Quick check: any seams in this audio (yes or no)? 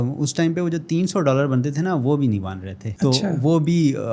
no